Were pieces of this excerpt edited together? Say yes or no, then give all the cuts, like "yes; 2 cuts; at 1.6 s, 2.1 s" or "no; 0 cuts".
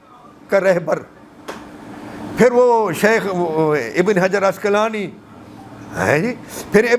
no; 0 cuts